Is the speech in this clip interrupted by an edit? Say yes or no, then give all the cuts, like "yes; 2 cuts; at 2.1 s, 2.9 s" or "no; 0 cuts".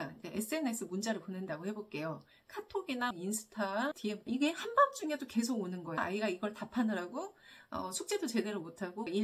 yes; 2 cuts; at 4.3 s, 6.0 s